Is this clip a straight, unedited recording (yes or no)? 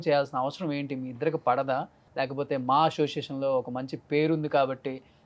no